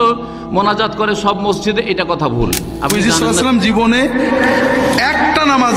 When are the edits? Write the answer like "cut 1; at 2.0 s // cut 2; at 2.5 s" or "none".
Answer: cut 1; at 2.9 s